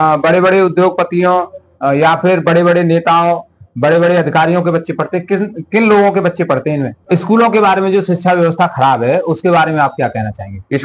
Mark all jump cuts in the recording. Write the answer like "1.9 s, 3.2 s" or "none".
7.0 s